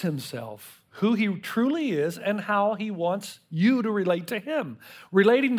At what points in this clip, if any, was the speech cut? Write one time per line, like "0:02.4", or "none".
none

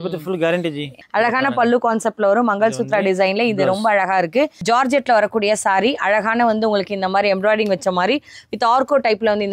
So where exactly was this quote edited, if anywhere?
0:01.0
0:04.6

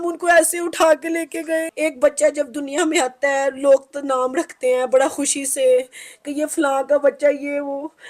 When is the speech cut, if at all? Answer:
0:01.7

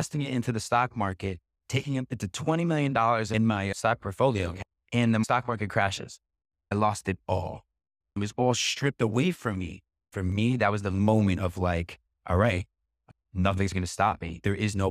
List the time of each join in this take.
0:03.3
0:05.2
0:06.7
0:08.2
0:10.0

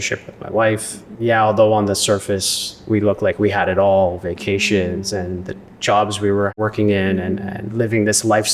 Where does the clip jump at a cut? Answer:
0:01.0
0:06.6

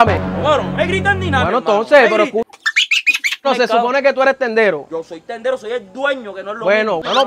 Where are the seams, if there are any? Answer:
0:03.4

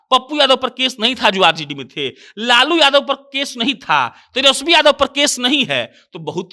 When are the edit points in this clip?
none

